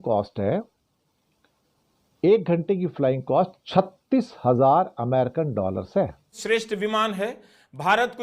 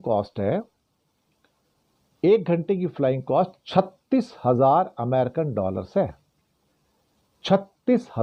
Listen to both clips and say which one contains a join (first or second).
first